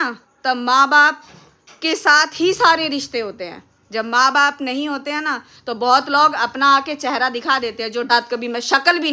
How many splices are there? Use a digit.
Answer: 1